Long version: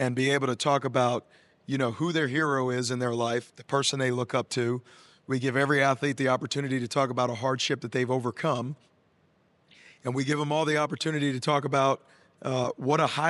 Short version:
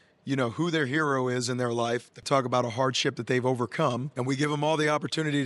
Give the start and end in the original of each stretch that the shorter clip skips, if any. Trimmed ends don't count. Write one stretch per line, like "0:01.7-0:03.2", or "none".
0:03.6-0:06.9
0:08.7-0:10.0